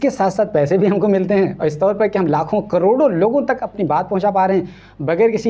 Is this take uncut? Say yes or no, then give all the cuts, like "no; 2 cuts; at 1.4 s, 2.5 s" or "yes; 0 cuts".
yes; 0 cuts